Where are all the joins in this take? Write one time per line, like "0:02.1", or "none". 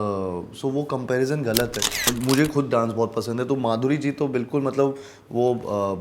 0:02.1